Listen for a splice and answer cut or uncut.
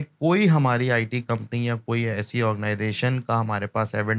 uncut